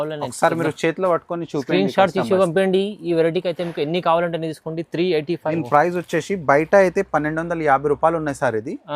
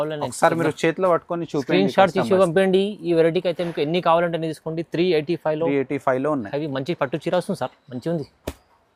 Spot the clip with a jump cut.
first; 1 cut; at 5.5 s

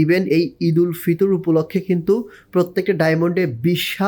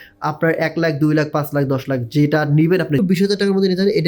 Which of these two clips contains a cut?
second; 1 cut; at 3.0 s

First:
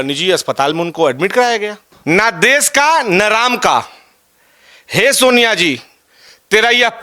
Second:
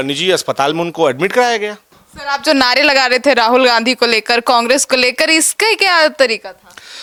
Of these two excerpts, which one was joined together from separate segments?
first; 1 cut; at 1.9 s

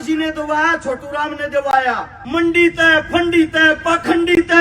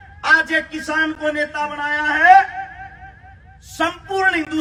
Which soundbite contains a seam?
first; 1 cut; at 2.1 s

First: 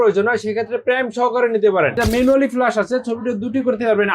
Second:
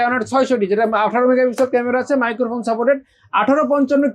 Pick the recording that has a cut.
first; 1 cut; at 2.0 s

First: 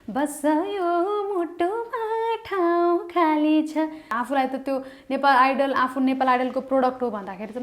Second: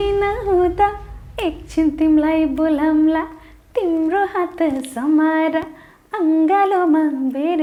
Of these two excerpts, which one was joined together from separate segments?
first; 1 cut; at 4.1 s

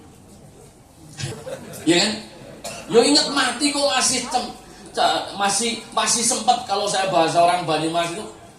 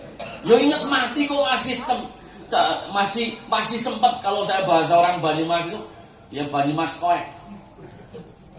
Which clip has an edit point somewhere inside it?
first; 1 cut; at 1.3 s

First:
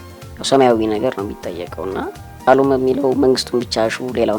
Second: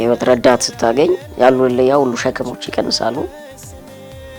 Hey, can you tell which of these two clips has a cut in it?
first; 1 cut; at 2.5 s

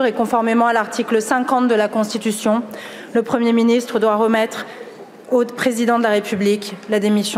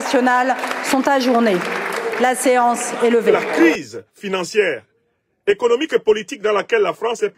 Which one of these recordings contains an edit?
second; 1 cut; at 3.6 s

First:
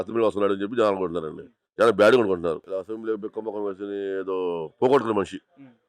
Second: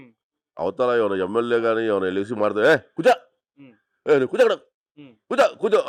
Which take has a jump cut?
first; 1 cut; at 2.6 s

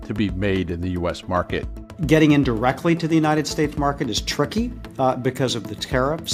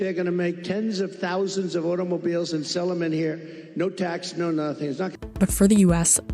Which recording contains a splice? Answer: second; 1 cut; at 5.1 s

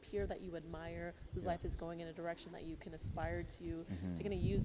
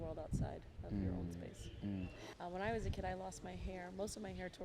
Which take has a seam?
second; 1 cut; at 2.3 s

